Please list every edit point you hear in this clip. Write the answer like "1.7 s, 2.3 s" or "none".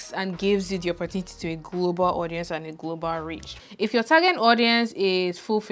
3.5 s